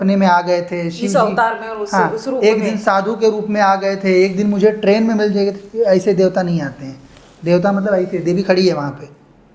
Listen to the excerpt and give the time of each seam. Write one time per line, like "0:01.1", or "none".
none